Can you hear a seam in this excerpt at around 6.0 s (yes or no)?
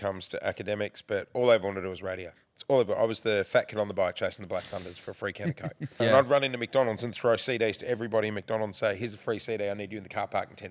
yes